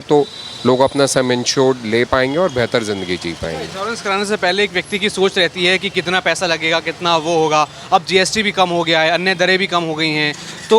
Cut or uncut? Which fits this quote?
uncut